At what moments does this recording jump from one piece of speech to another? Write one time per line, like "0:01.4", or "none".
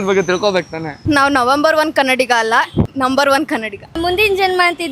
0:00.9
0:03.9